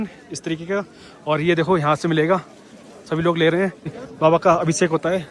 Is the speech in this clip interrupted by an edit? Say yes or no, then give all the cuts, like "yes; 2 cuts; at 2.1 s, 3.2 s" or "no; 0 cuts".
yes; 1 cut; at 4.0 s